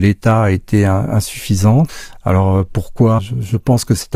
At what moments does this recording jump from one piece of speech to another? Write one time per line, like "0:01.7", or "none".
0:02.1
0:03.2